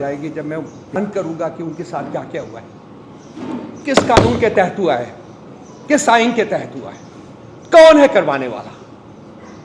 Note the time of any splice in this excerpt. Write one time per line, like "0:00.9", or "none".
0:01.0